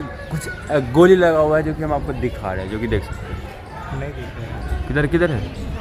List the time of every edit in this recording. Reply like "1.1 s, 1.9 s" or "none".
none